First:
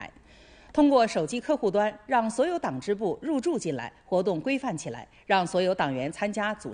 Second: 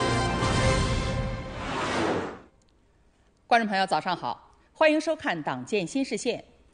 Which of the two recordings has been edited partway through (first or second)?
second